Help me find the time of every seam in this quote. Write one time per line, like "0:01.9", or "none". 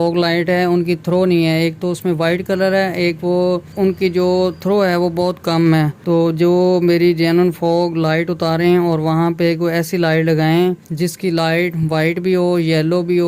0:03.6

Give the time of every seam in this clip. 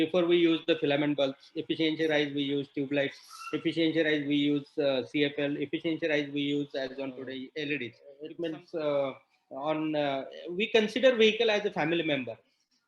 0:08.0

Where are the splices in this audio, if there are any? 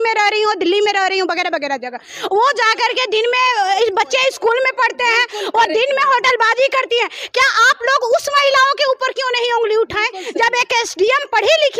none

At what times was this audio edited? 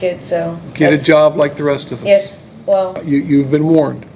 0:03.0

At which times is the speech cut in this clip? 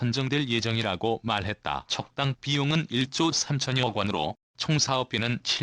0:01.9
0:04.7

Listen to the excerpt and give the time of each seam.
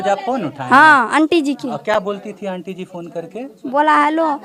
none

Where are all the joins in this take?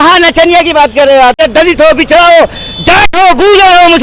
0:01.4

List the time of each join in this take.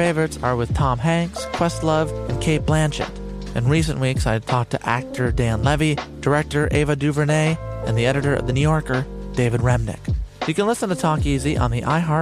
none

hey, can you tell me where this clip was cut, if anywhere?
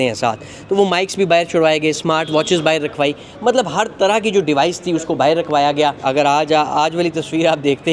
0:06.0

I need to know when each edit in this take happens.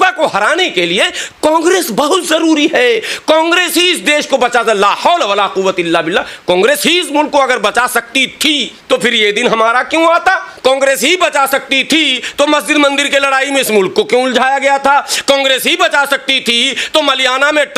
0:08.7
0:10.5

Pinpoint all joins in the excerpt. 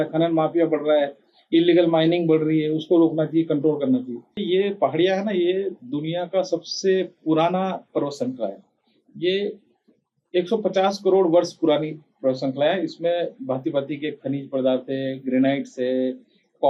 0:04.4

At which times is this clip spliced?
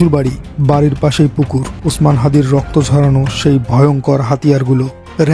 0:01.8

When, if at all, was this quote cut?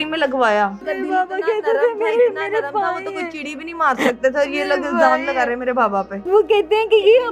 0:00.9
0:06.2

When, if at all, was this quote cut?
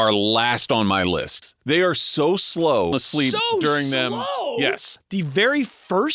0:01.5
0:02.9
0:05.0

